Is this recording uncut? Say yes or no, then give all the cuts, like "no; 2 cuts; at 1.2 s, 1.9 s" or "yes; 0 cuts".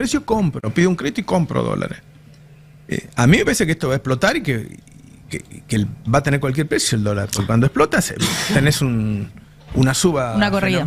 yes; 0 cuts